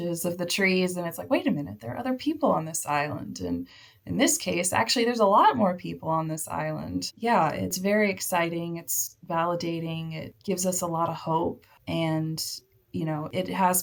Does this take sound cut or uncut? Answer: uncut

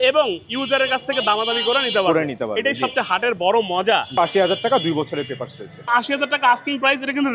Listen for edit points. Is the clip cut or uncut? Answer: cut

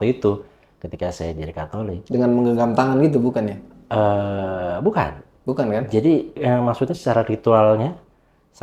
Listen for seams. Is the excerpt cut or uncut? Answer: uncut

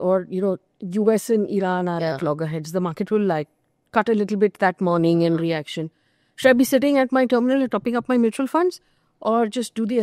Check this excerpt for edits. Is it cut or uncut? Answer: uncut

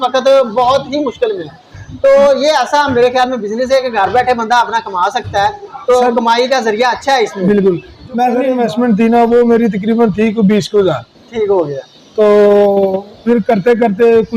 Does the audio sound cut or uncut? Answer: cut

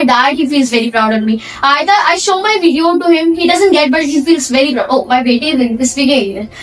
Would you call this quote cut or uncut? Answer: uncut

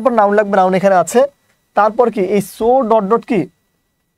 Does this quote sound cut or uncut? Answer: uncut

